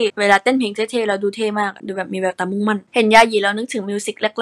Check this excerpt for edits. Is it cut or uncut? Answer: uncut